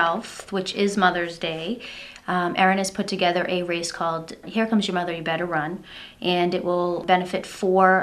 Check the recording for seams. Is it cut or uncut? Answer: cut